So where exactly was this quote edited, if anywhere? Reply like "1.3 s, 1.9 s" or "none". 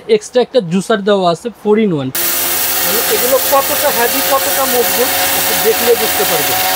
2.1 s